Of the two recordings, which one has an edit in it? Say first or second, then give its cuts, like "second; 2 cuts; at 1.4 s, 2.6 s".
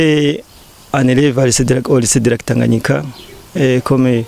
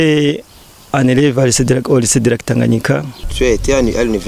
second; 1 cut; at 3.2 s